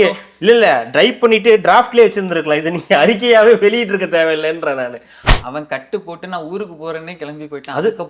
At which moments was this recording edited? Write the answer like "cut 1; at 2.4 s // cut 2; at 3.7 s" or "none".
cut 1; at 5.2 s